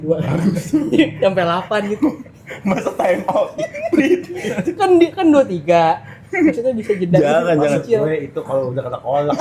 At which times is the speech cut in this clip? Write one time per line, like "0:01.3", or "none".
none